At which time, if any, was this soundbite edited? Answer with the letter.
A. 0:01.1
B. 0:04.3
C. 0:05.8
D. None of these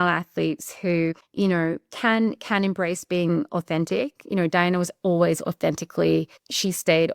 A